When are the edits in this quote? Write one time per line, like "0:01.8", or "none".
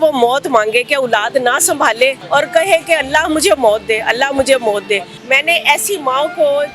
0:02.2
0:05.1